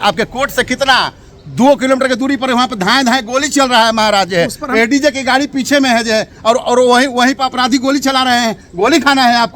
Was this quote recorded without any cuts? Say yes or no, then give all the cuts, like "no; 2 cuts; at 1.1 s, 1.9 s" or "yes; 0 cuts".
yes; 0 cuts